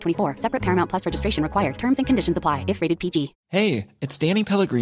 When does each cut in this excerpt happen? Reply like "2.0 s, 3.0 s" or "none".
3.4 s